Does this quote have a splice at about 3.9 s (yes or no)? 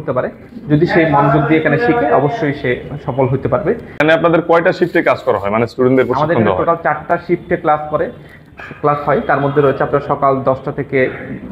yes